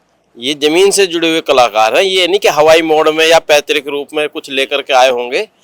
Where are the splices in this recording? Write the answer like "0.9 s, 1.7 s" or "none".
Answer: none